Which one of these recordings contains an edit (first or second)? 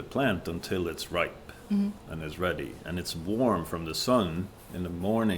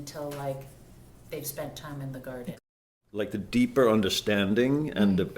second